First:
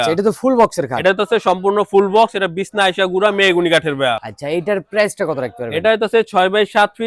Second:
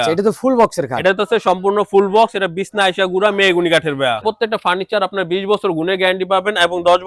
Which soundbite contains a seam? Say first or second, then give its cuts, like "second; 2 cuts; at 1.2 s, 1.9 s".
second; 1 cut; at 4.2 s